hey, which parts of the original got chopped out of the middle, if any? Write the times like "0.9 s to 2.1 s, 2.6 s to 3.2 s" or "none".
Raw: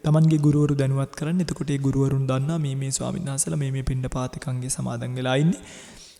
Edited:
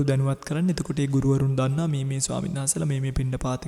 none